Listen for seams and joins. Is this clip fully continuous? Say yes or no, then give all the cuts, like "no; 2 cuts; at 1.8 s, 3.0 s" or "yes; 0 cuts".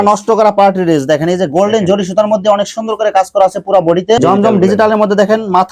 no; 1 cut; at 4.2 s